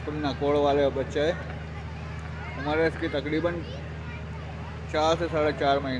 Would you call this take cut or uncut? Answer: uncut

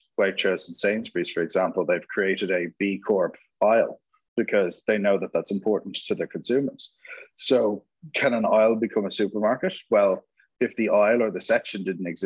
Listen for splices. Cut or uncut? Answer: uncut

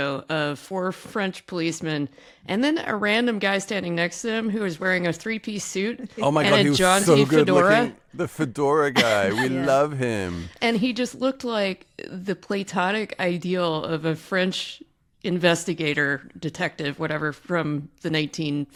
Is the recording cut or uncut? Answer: uncut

